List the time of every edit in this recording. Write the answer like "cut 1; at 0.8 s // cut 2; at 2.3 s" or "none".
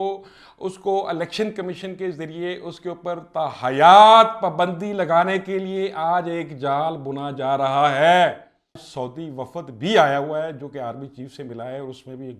cut 1; at 8.8 s